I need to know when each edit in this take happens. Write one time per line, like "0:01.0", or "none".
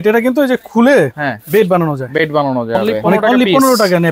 0:03.1